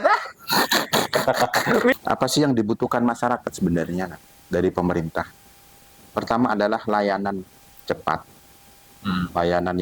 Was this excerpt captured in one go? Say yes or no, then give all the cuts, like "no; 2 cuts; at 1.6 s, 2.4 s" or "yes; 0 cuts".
no; 1 cut; at 1.9 s